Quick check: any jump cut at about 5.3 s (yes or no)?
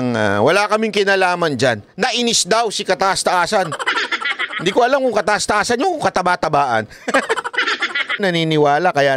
no